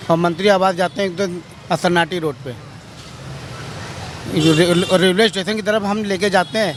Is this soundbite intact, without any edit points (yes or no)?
yes